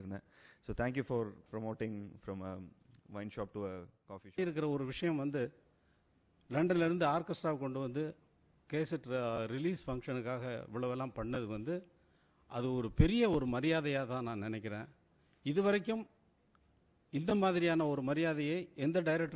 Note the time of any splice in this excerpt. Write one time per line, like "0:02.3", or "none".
0:04.4